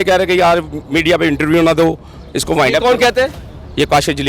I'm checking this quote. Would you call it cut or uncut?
uncut